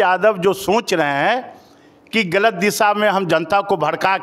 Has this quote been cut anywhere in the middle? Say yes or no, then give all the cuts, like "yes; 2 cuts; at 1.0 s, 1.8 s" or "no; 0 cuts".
no; 0 cuts